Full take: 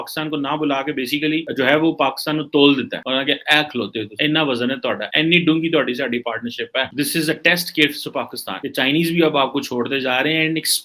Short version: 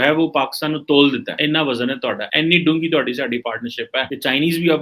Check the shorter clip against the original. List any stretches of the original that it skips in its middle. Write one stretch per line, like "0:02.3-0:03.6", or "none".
0:03.0-0:04.1
0:06.9-0:08.6